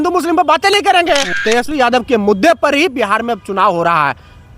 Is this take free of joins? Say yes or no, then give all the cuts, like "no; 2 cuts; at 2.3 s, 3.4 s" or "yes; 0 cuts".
no; 1 cut; at 1.4 s